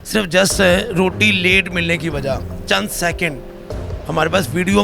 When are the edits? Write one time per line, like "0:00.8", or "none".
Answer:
none